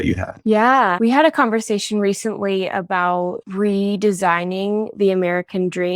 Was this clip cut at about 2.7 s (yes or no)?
no